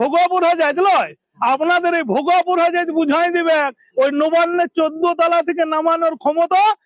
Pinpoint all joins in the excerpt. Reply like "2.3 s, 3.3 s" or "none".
none

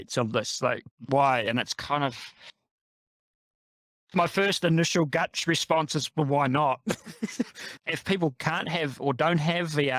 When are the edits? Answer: none

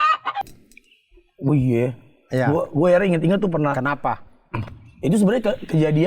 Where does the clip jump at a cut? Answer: none

